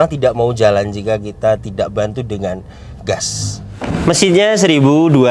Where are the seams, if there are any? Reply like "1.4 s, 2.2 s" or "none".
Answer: 3.9 s